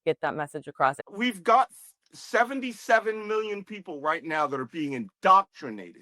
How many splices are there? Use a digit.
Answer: 1